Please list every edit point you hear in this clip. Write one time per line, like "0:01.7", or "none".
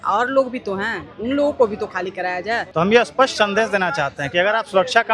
0:02.6